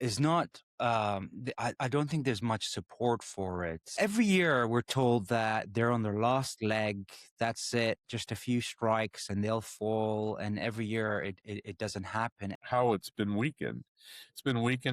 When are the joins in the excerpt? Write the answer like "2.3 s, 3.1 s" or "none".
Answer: 3.9 s, 12.6 s